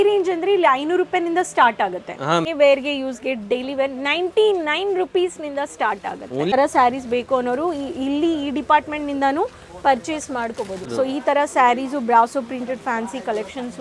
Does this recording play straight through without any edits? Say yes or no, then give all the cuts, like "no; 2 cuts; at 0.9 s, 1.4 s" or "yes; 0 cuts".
no; 3 cuts; at 2.5 s, 6.5 s, 10.9 s